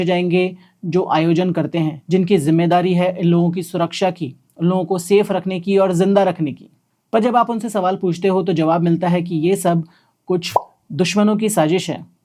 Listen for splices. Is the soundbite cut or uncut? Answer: uncut